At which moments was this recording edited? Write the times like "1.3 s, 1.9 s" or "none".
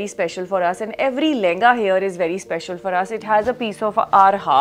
none

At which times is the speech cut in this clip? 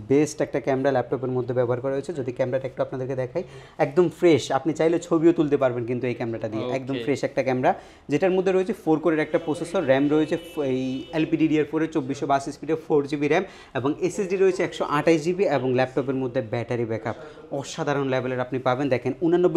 none

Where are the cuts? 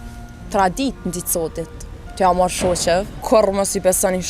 3.2 s

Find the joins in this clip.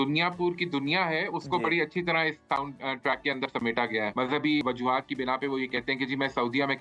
4.6 s

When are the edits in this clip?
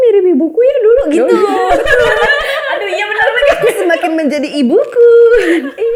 none

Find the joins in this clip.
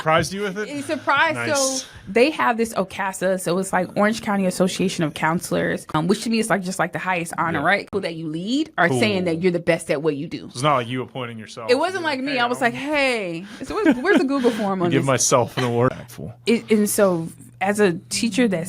5.9 s, 7.9 s, 15.9 s

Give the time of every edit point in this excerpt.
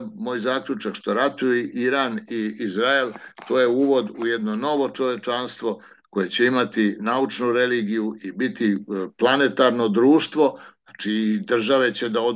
none

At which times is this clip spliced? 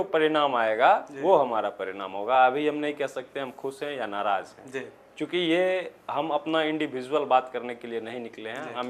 none

